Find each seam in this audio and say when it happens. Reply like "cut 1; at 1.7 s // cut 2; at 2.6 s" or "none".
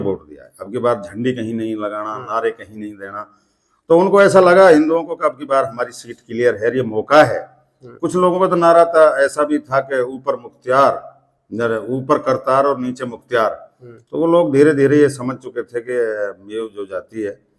none